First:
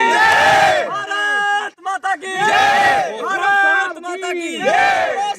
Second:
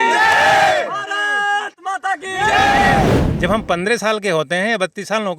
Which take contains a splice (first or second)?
second